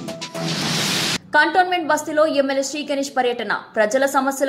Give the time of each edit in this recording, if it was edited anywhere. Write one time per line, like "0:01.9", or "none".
0:01.2

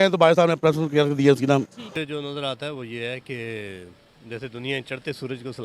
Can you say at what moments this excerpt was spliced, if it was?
0:01.8

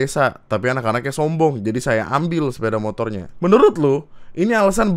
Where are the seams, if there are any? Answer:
0:03.2

